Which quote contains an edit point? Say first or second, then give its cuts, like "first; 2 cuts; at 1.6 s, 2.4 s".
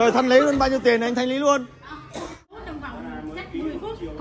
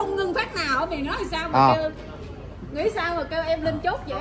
first; 1 cut; at 2.6 s